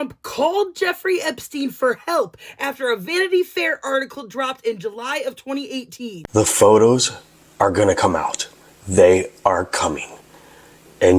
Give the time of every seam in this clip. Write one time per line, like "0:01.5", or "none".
0:06.2